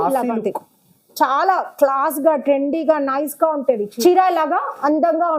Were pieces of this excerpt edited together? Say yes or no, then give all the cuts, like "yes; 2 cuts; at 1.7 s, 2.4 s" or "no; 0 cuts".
yes; 1 cut; at 3.9 s